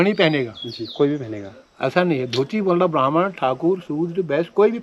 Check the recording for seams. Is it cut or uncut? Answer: uncut